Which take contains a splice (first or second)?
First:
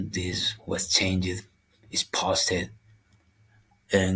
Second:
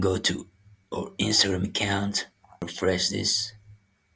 second